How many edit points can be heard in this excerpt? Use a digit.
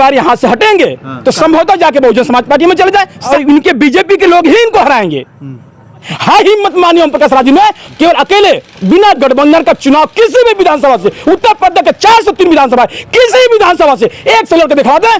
2